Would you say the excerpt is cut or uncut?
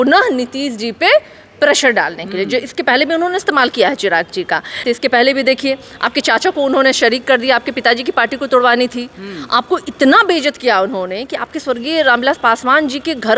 cut